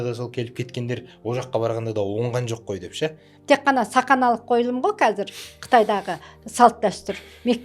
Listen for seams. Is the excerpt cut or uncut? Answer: cut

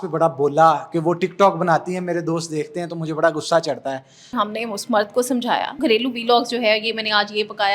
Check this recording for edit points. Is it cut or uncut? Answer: cut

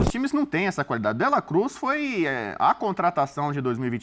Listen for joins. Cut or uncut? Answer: uncut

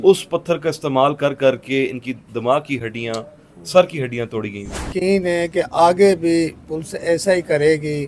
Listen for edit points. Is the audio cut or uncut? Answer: cut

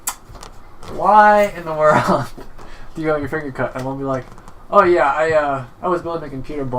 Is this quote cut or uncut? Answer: uncut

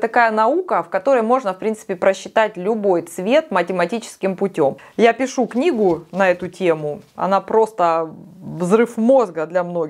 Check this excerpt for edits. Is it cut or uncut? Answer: uncut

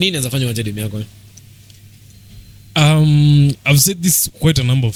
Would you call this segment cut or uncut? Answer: uncut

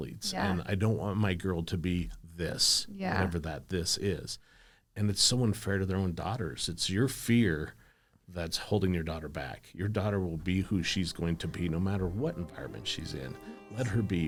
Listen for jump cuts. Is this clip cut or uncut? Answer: uncut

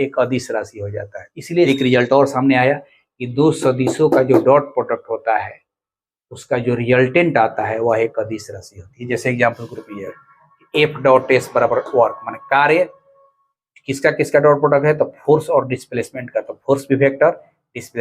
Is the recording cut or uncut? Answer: cut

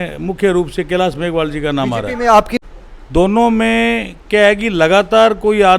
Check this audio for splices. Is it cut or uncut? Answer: cut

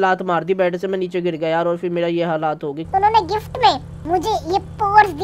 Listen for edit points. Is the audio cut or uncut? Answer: cut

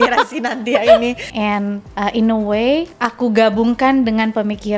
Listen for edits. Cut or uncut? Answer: cut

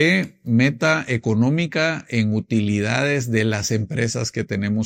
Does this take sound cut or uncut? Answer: uncut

